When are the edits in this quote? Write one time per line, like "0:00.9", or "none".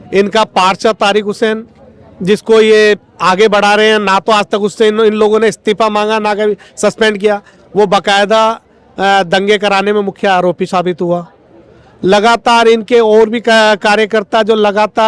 none